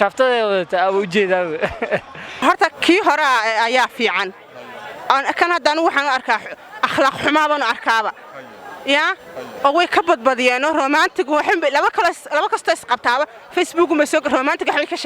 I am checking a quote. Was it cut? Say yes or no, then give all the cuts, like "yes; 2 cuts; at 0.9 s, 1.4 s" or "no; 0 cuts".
yes; 1 cut; at 2.4 s